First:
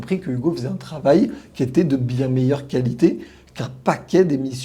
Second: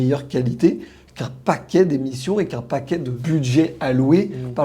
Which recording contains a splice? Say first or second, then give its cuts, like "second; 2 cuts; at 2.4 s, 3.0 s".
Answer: second; 1 cut; at 3.2 s